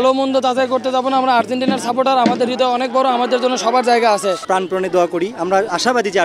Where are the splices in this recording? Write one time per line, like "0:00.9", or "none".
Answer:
0:04.4